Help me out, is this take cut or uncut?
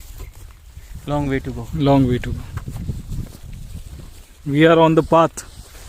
uncut